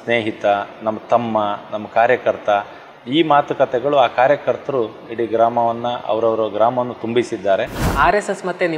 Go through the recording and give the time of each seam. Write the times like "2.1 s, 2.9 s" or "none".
7.8 s